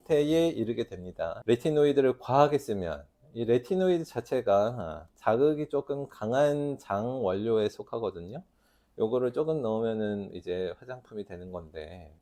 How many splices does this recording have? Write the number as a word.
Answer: zero